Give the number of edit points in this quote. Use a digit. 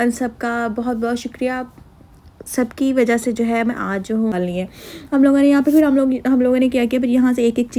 1